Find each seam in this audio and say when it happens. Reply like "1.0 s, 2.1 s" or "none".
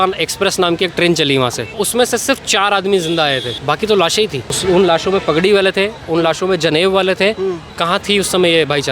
1.7 s, 4.5 s